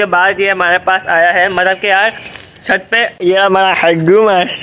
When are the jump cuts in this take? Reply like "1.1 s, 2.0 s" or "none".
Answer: none